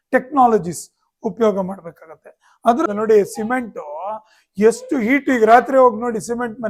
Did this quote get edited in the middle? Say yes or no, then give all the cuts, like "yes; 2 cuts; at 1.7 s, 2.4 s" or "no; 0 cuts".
yes; 1 cut; at 2.9 s